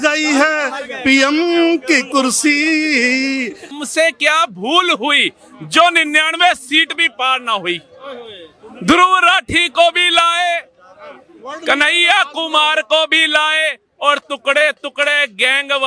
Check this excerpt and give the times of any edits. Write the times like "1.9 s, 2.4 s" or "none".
3.8 s